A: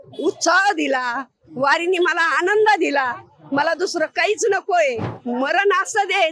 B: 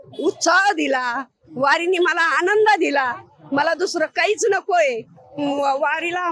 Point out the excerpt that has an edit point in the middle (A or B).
A